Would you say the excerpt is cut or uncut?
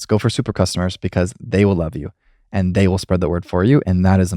uncut